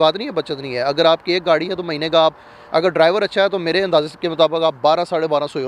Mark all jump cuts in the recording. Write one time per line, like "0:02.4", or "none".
none

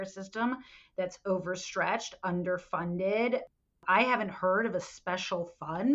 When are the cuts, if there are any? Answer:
0:03.8

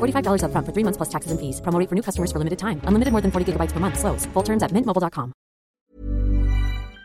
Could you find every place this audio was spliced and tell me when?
0:05.8

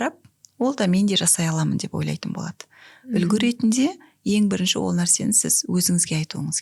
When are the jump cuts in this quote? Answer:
none

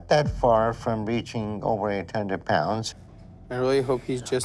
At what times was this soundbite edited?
none

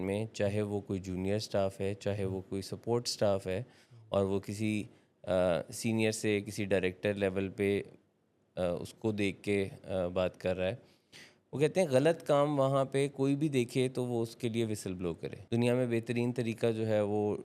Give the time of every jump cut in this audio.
0:15.3

